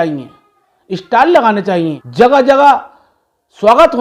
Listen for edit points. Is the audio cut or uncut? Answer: cut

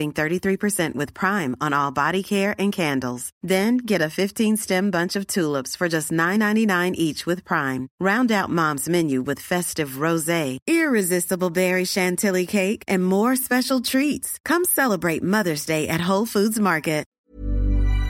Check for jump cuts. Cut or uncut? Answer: cut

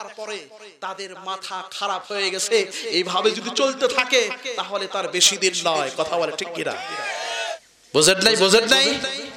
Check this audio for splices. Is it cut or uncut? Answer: cut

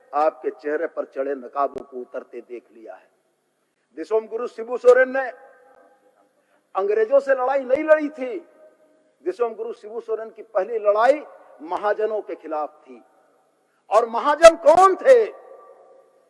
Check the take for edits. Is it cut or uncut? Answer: uncut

